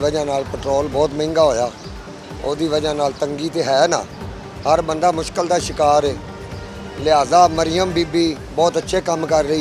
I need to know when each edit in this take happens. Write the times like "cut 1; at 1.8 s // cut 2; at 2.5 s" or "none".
none